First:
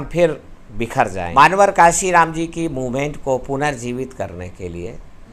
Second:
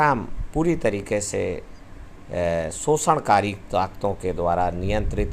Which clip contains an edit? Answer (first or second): first